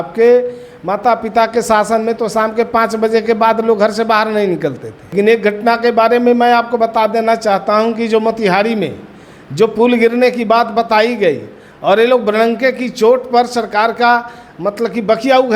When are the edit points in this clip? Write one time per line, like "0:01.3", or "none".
0:05.1